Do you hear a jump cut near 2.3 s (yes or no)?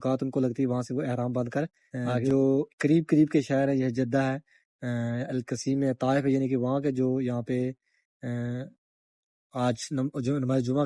yes